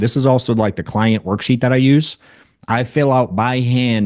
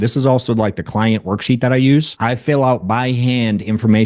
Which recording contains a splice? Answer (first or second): second